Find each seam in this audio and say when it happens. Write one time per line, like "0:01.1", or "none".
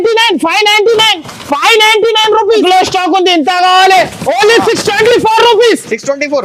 0:02.6